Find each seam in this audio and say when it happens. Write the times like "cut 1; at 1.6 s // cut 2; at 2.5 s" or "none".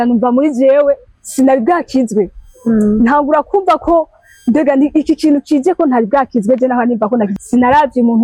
cut 1; at 7.3 s